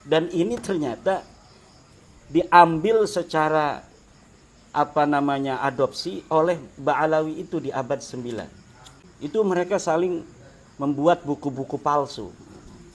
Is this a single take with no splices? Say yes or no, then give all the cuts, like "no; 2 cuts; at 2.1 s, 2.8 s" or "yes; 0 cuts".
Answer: no; 1 cut; at 9.5 s